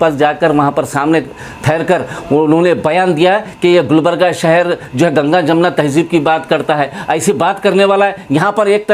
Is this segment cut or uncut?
uncut